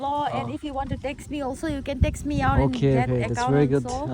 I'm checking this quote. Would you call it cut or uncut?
uncut